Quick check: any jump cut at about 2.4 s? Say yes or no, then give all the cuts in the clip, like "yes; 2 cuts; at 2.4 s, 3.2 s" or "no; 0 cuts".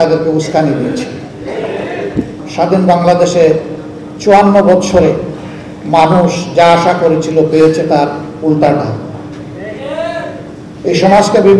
yes; 1 cut; at 2.4 s